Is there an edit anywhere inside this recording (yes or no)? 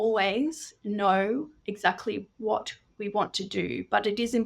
no